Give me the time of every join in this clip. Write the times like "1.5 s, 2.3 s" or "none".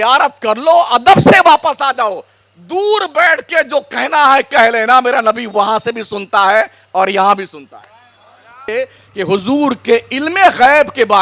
8.7 s